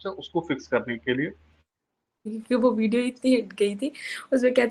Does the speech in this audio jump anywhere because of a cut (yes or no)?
yes